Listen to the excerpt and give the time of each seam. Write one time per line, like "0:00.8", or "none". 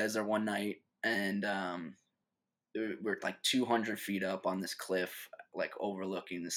none